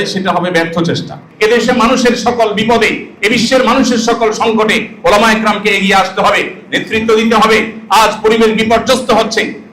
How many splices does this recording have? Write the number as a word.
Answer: one